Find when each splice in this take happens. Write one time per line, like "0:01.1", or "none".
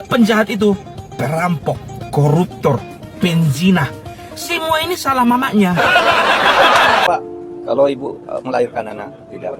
0:07.1